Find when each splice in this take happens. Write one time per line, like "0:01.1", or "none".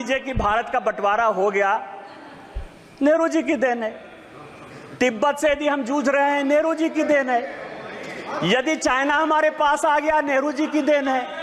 none